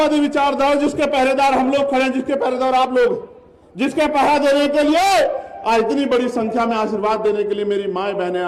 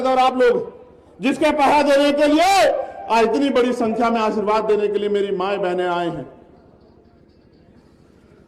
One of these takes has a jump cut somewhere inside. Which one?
second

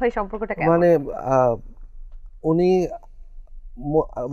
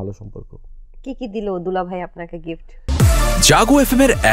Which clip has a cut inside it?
second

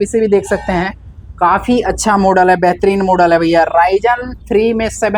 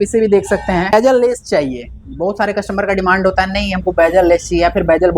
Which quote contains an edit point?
second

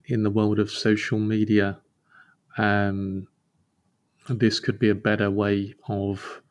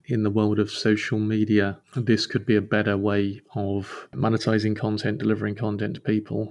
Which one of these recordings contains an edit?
second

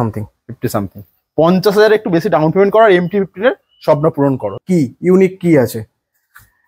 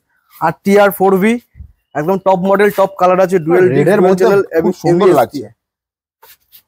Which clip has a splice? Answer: first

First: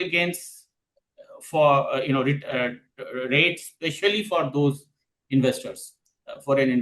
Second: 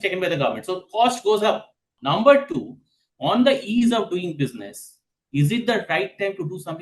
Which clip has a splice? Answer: second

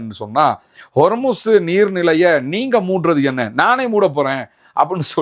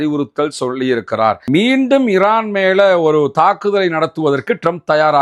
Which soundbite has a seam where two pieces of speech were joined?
second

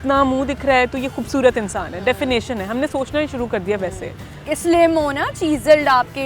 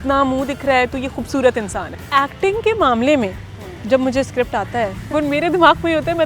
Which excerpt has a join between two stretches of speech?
second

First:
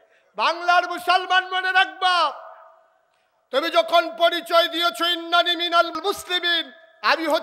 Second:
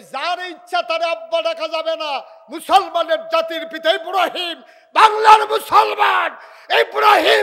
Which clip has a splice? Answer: first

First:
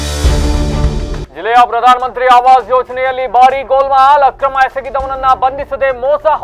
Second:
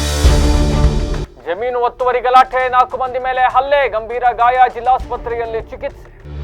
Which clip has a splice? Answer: first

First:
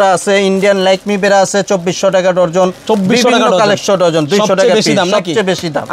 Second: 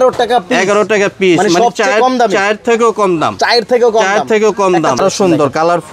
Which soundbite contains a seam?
second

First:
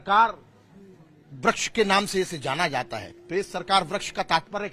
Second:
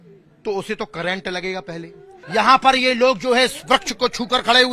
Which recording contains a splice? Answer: second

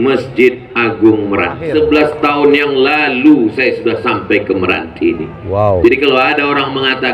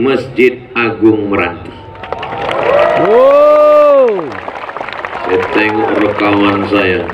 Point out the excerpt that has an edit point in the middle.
first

